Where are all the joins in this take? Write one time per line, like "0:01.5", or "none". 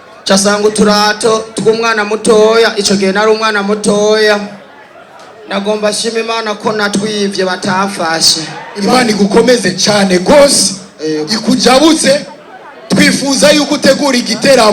0:08.6